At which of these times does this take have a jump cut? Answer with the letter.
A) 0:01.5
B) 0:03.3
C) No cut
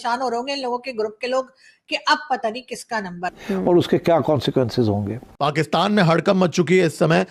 B